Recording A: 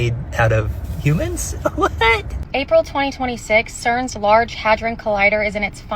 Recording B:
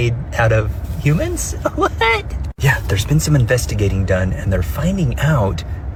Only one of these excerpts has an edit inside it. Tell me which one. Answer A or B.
A